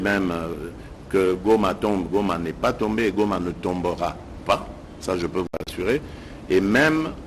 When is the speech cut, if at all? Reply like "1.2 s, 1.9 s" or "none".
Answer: none